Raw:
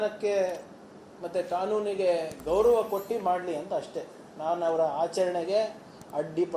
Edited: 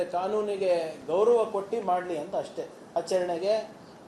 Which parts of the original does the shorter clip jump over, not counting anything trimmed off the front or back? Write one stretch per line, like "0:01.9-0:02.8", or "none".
0:04.3-0:05.0